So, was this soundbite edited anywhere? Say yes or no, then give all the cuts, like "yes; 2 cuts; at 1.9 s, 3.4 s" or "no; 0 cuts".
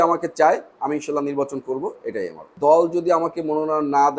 yes; 1 cut; at 2.4 s